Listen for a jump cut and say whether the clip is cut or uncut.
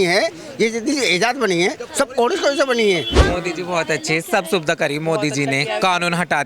cut